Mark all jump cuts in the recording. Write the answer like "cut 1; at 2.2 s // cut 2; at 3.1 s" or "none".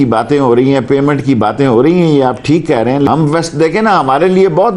cut 1; at 3.1 s